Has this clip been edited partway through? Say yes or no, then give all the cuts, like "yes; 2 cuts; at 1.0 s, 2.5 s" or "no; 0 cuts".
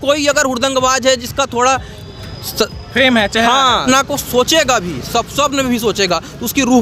yes; 1 cut; at 3.8 s